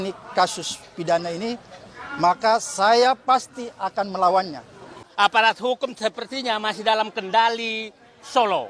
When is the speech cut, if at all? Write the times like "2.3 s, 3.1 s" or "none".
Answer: 5.0 s